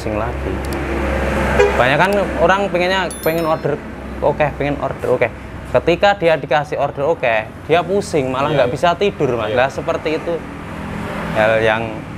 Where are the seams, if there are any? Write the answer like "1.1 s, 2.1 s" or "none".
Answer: none